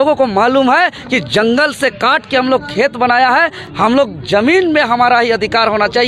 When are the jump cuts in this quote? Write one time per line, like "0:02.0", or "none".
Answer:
none